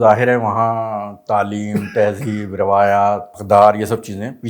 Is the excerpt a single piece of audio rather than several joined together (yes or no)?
no